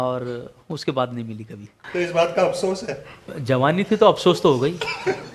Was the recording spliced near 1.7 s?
yes; 2 cuts; at 1.7 s, 3.3 s

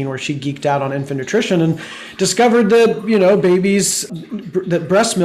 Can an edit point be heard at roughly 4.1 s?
yes; 1 cut; at 4.1 s

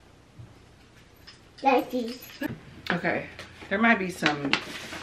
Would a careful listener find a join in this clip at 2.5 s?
yes; 1 cut; at 2.5 s

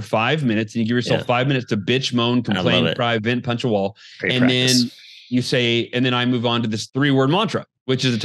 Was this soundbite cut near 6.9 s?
yes; 1 cut; at 6.9 s

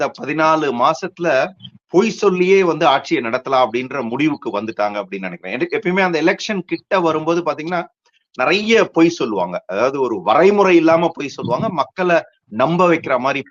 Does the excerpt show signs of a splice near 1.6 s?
no; 0 cuts

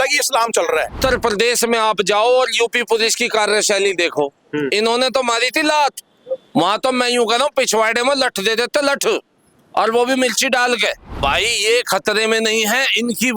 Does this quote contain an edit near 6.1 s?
no; 2 cuts; at 0.9 s, 11.1 s

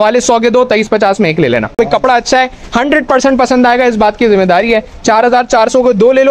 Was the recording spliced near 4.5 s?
no; 1 cut; at 1.8 s

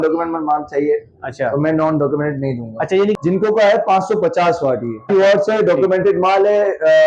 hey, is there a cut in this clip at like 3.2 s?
yes; 2 cuts; at 3.2 s, 5.1 s

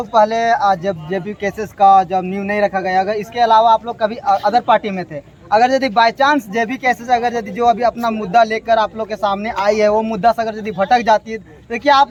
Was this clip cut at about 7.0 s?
no; 0 cuts

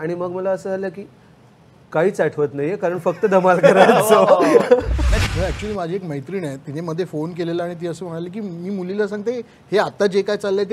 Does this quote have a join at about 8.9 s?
no; 1 cut; at 5.1 s

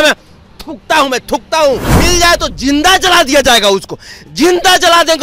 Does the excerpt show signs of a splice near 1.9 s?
yes; 1 cut; at 1.9 s

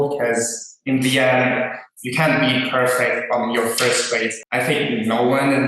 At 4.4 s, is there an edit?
yes; 1 cut; at 4.4 s

